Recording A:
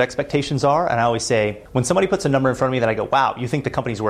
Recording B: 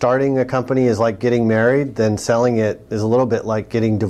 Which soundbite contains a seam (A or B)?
A